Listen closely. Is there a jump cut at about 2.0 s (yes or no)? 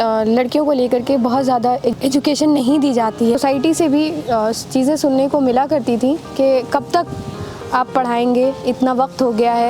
yes